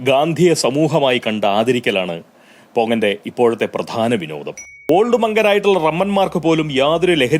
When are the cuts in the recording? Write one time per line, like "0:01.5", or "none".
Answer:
0:04.7